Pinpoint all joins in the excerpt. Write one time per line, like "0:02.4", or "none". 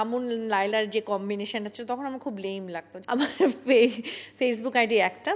0:02.9